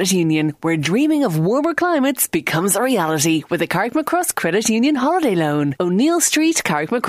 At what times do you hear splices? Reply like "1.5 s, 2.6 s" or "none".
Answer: none